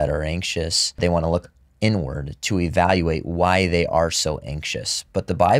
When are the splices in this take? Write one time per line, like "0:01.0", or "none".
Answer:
0:01.0